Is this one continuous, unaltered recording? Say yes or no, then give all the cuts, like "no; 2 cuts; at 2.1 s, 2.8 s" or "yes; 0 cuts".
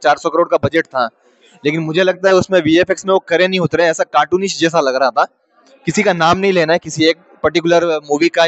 yes; 0 cuts